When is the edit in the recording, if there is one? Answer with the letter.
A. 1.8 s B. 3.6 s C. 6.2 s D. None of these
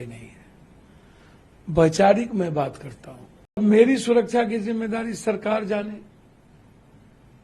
B